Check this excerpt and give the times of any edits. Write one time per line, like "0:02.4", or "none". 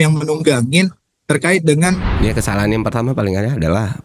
0:02.1

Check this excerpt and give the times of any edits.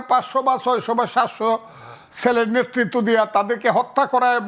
none

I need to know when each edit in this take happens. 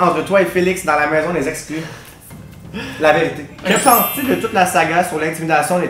0:03.5

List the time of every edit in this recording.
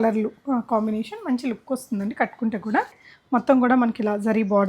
0:03.1

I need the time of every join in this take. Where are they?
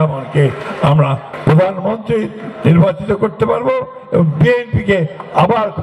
none

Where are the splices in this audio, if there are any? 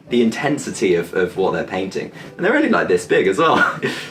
none

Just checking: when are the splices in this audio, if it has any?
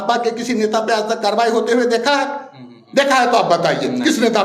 none

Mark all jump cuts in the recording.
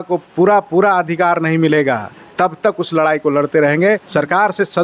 0:02.2
0:04.1

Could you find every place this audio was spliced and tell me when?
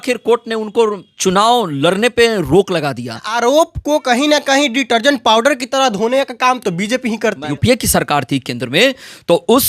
0:03.3
0:07.5

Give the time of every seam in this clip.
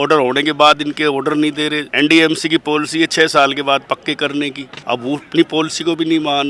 0:01.8
0:04.7

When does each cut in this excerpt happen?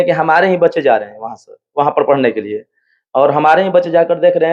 none

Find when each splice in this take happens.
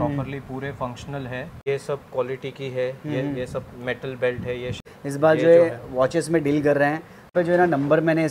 0:01.6
0:04.8
0:07.3

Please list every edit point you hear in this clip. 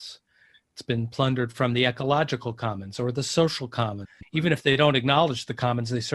0:04.1

